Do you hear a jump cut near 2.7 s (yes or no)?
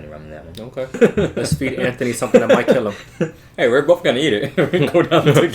no